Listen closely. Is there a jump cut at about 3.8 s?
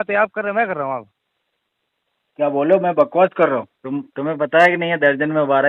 yes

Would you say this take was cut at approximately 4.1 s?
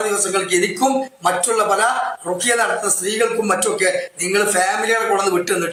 no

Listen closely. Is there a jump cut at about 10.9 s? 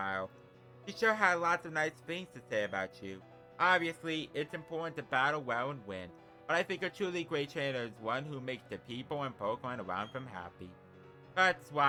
no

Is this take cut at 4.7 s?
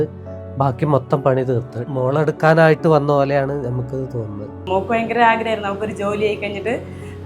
yes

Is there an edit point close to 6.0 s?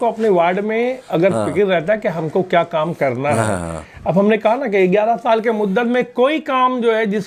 no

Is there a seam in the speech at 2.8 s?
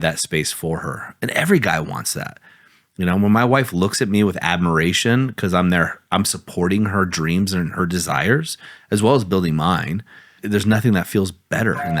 no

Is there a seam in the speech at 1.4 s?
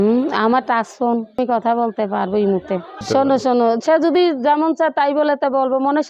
yes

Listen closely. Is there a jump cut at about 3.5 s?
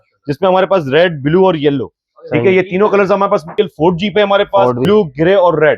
yes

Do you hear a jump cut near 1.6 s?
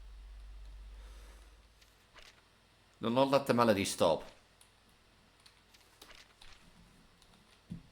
yes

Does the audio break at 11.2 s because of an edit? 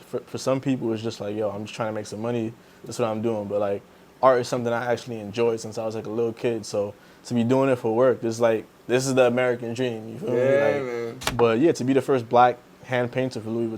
yes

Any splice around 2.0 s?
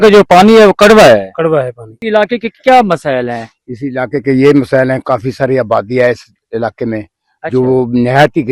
yes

